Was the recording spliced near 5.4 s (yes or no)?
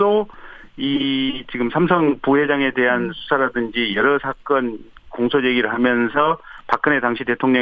yes